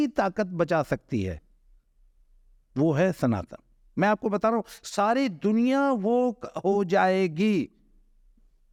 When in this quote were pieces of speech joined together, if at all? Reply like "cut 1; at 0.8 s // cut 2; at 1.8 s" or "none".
none